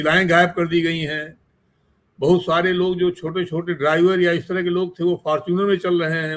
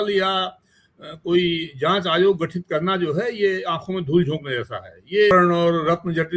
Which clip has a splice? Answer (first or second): second